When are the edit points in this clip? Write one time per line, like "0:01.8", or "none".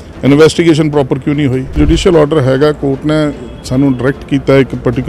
0:01.8

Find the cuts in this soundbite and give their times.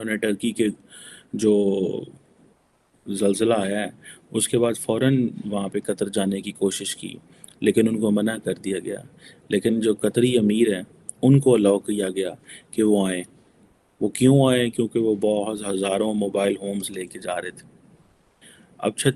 none

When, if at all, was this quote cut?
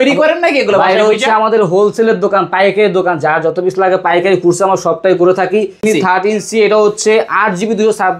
0:05.8

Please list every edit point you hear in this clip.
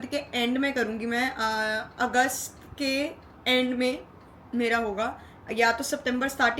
none

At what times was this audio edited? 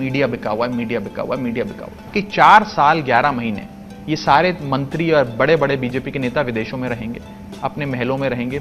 0:02.1

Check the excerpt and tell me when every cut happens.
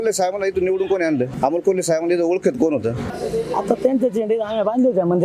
0:01.3
0:03.1

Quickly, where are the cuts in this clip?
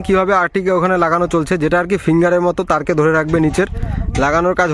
none

